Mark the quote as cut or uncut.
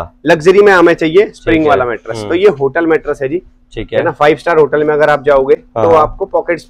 uncut